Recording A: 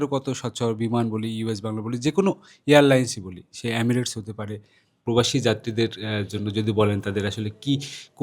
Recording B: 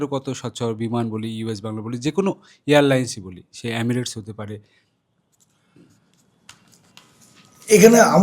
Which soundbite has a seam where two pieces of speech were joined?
A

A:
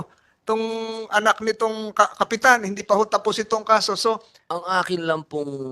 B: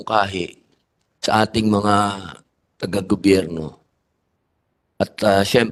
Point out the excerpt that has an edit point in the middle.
A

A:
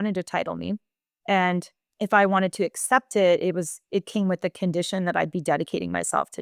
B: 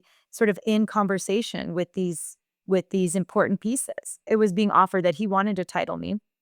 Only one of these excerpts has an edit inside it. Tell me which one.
B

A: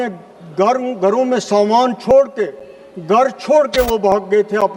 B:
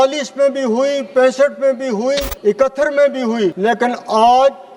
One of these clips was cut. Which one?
B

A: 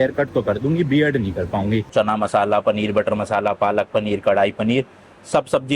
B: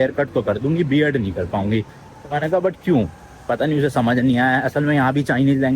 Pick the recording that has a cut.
A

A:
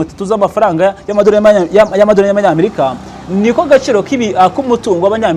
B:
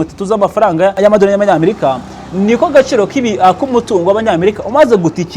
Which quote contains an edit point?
B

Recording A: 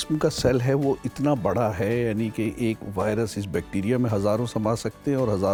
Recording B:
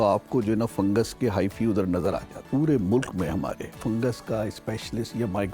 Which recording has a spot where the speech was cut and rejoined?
B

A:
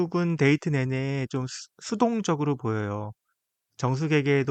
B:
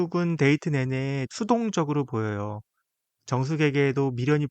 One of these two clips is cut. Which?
B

